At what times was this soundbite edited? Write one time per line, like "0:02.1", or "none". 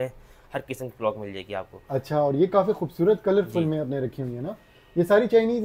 none